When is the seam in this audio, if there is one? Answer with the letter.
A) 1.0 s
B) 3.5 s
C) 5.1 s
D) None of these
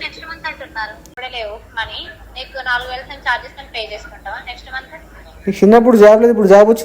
A